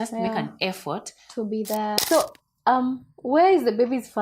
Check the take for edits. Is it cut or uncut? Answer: cut